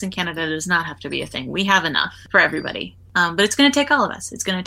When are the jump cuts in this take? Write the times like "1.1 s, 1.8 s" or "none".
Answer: 3.1 s